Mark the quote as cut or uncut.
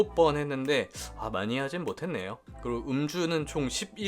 cut